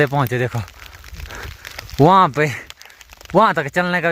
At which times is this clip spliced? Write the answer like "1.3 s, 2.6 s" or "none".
none